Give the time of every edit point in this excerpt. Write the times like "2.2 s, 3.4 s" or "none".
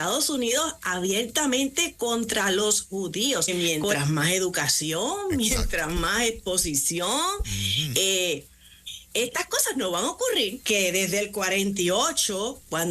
3.5 s, 10.6 s